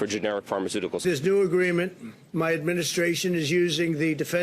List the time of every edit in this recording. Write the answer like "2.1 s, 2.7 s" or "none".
1.0 s